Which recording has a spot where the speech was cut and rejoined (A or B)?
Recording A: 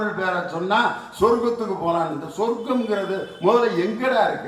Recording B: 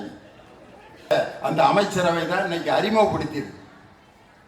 B